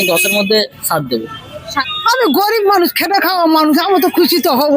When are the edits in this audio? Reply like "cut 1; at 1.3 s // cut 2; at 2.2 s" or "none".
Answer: cut 1; at 1.5 s